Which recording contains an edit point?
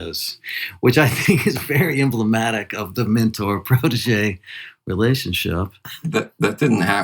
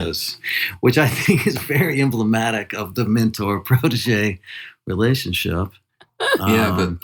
first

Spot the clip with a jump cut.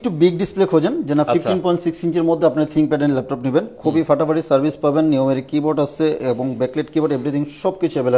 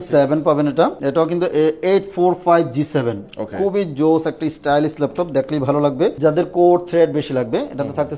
second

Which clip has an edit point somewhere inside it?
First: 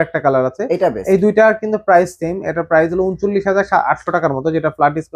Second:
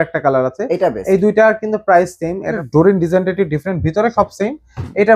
second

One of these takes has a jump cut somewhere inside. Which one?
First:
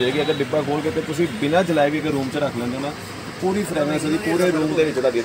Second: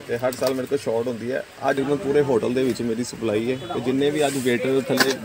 second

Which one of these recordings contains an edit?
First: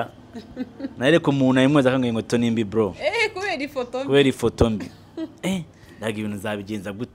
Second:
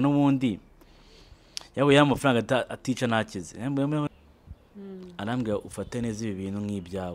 second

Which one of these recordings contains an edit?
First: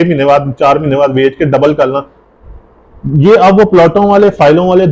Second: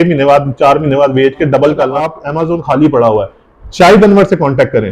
second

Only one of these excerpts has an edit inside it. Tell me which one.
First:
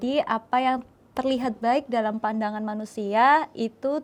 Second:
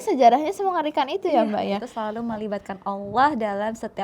second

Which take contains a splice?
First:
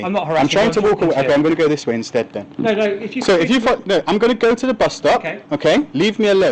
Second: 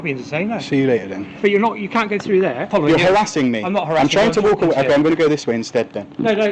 second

